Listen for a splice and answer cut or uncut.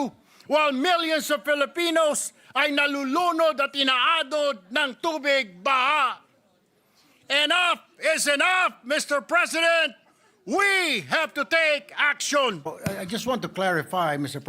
cut